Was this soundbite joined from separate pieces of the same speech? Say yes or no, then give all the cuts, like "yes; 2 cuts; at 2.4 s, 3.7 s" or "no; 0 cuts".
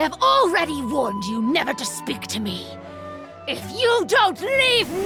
no; 0 cuts